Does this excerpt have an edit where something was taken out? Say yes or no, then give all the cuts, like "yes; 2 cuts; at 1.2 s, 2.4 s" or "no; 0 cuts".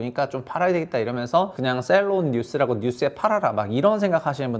yes; 1 cut; at 1.6 s